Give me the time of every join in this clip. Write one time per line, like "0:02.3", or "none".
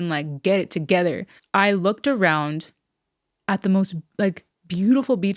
0:01.3